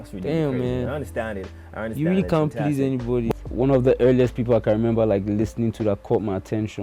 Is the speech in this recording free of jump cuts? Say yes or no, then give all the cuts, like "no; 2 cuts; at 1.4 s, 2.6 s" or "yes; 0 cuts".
no; 1 cut; at 3.3 s